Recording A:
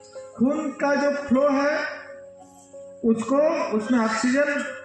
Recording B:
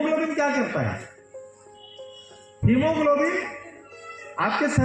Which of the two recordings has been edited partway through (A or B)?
B